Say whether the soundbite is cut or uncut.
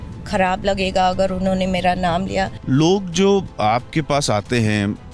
cut